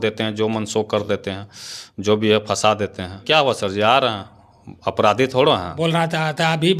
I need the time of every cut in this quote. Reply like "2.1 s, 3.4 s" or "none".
3.2 s, 5.7 s